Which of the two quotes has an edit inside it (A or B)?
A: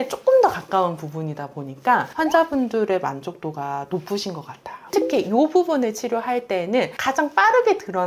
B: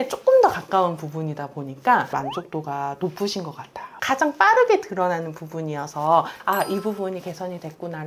B